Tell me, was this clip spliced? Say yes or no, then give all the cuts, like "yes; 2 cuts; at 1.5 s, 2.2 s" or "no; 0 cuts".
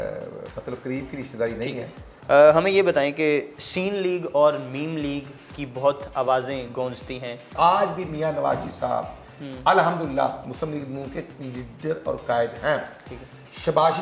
yes; 2 cuts; at 2.1 s, 7.5 s